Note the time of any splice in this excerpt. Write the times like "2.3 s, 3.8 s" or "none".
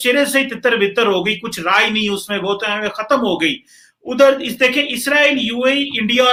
none

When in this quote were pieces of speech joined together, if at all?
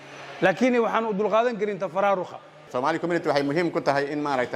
2.7 s

